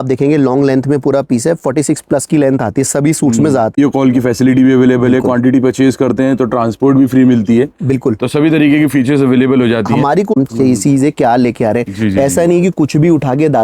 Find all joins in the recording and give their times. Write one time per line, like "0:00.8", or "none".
0:03.8
0:10.3